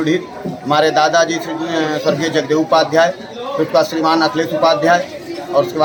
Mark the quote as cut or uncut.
uncut